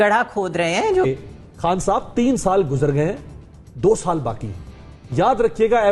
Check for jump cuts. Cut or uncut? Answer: cut